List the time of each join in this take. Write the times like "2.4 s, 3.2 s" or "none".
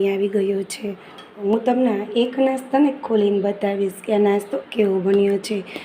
1.4 s